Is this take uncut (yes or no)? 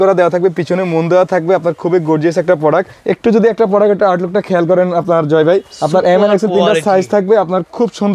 no